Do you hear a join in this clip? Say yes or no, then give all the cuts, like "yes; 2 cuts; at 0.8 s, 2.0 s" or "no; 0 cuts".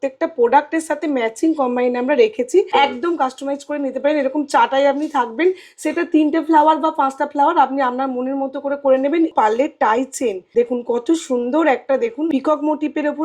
yes; 4 cuts; at 2.7 s, 9.3 s, 10.4 s, 12.3 s